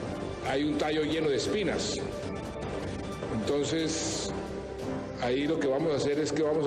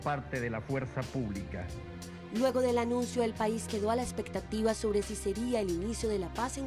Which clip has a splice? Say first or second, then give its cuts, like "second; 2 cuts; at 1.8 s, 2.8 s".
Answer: first; 1 cut; at 2.2 s